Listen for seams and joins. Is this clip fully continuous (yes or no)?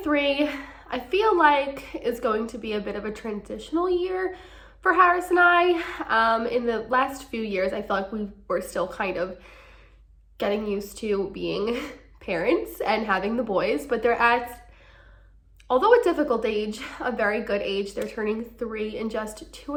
yes